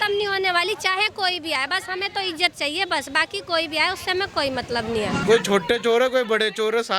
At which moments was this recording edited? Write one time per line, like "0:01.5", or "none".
0:05.2